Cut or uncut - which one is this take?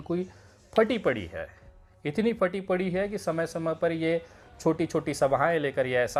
uncut